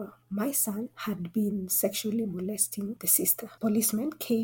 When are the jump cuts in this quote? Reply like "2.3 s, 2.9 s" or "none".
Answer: 1.0 s, 3.5 s